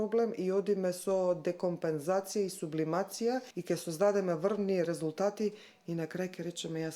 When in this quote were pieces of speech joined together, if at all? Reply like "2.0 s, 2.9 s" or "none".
3.5 s